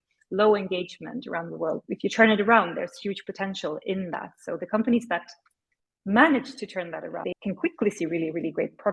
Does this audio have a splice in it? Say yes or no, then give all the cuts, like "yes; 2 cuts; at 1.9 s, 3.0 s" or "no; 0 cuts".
yes; 2 cuts; at 1.8 s, 7.3 s